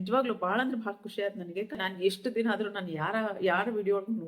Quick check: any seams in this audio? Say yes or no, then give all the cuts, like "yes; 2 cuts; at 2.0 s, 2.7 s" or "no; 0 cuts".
yes; 1 cut; at 1.8 s